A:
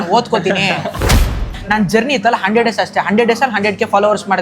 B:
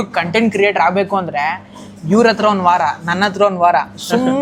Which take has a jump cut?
A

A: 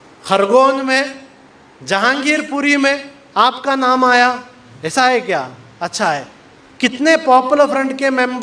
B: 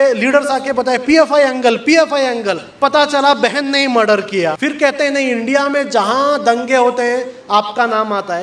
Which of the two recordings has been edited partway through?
B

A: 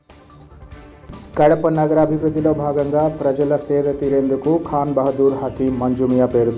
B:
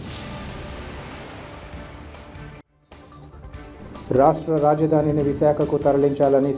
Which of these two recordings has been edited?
A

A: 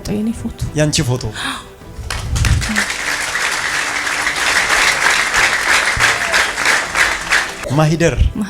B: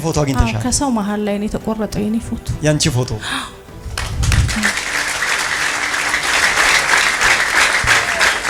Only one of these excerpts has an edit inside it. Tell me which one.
A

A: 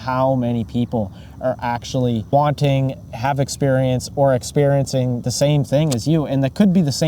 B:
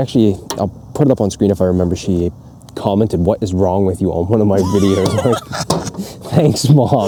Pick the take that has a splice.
A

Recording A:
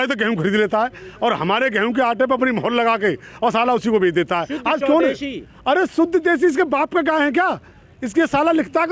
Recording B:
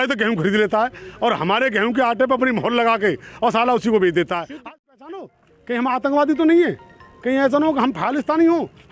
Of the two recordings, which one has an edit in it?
B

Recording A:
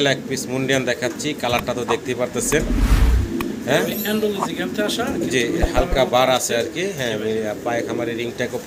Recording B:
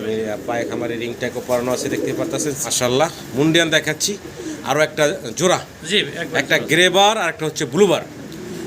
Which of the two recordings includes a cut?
B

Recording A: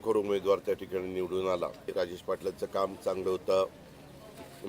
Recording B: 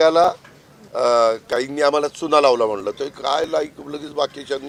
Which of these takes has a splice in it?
A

